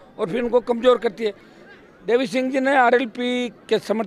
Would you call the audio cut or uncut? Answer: cut